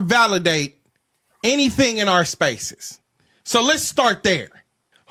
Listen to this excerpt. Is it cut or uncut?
uncut